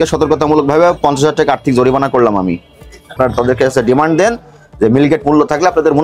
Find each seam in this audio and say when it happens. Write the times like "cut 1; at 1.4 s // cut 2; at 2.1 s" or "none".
cut 1; at 3.1 s